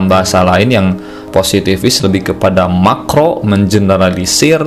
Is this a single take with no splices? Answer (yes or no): yes